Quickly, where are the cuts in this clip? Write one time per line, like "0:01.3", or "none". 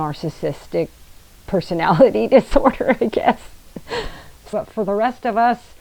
0:04.4